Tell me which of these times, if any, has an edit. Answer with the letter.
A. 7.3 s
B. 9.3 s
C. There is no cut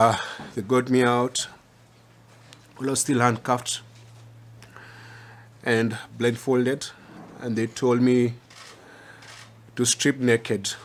C